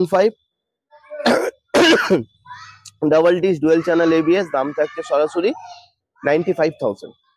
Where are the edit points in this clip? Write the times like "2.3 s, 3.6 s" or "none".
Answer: none